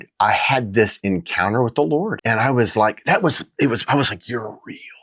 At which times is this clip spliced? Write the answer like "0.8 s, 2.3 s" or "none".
2.2 s

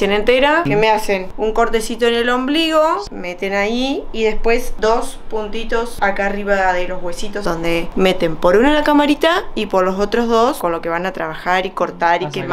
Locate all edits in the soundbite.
0.8 s, 3.1 s, 4.7 s, 5.9 s, 7.5 s, 10.6 s

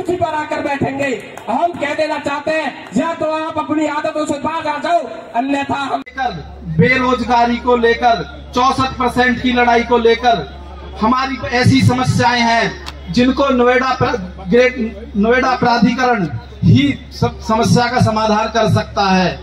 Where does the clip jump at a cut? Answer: 6.1 s

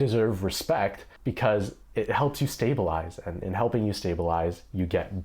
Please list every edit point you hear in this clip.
1.1 s, 1.8 s

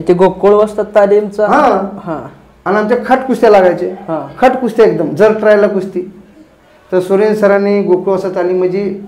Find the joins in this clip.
none

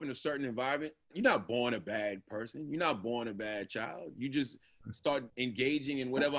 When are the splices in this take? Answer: 1.1 s, 5.3 s

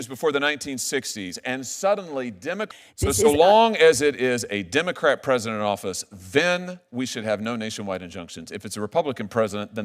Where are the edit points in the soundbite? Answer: 2.7 s

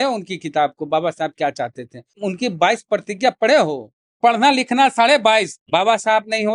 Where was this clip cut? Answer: 2.2 s, 4.1 s, 5.6 s

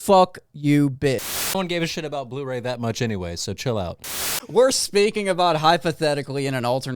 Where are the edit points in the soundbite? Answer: 1.3 s, 4.1 s

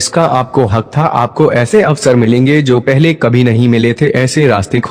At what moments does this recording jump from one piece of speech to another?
3.8 s

